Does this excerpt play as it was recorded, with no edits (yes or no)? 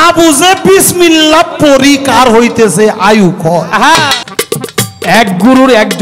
no